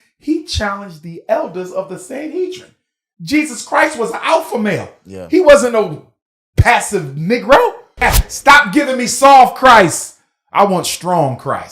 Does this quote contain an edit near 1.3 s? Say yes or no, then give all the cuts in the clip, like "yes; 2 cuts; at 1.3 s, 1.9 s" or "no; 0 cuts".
no; 1 cut; at 7.9 s